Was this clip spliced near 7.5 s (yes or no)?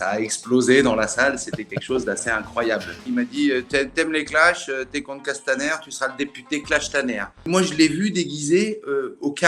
yes